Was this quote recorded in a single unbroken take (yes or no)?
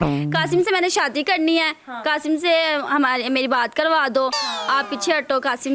yes